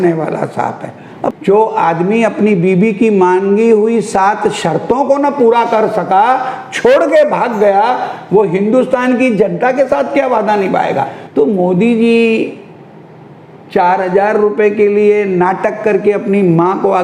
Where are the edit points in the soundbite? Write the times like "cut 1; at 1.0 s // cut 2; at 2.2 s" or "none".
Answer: cut 1; at 1.4 s // cut 2; at 11.2 s